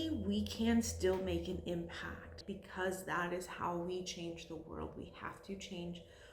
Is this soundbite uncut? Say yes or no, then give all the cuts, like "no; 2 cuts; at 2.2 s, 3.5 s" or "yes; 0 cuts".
no; 1 cut; at 2.4 s